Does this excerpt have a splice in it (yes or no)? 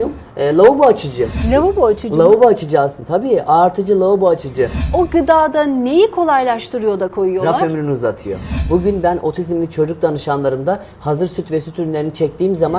yes